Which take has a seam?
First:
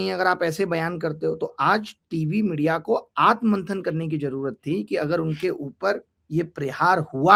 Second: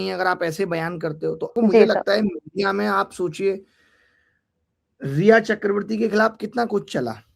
second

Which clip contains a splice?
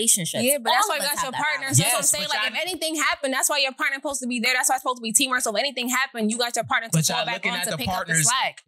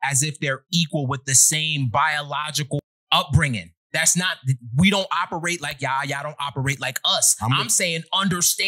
second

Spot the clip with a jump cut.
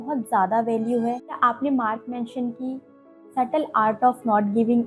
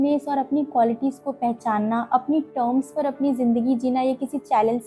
first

